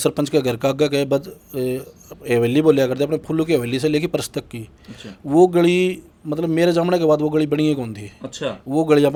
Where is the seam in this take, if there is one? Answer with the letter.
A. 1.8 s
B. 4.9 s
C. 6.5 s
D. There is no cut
D